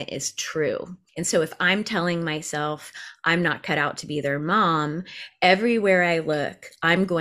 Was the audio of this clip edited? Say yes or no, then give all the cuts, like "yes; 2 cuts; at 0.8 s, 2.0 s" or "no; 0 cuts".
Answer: yes; 1 cut; at 1.0 s